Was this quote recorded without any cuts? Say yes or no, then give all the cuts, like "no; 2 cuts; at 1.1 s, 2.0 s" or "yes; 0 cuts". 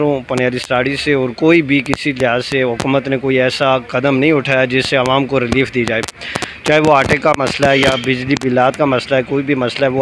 yes; 0 cuts